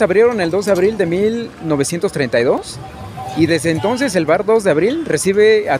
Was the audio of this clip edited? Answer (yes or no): no